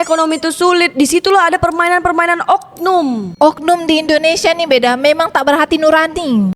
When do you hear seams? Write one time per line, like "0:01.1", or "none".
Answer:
none